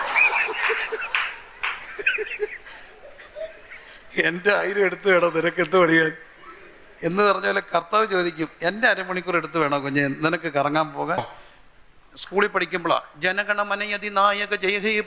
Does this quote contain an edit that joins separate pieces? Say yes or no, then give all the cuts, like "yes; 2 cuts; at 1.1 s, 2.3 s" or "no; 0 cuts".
yes; 1 cut; at 11.2 s